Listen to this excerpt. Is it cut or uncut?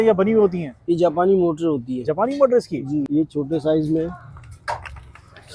cut